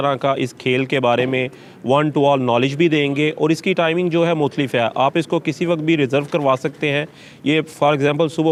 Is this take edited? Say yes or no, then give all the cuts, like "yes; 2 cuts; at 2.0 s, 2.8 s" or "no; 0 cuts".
no; 0 cuts